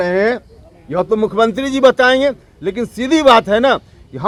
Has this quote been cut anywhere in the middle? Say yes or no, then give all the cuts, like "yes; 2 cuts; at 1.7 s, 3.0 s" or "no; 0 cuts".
no; 0 cuts